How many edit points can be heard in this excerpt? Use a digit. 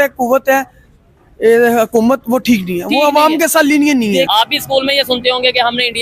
1